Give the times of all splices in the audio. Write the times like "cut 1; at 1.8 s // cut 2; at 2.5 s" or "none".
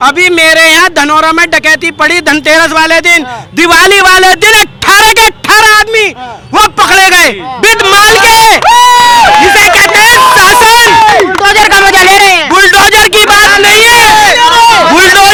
none